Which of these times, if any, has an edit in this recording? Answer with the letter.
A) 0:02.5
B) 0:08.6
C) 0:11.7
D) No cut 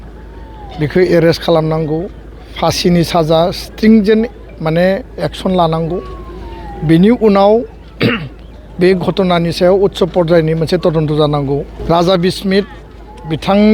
C